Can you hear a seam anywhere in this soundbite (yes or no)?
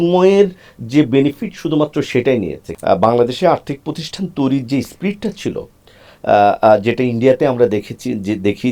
yes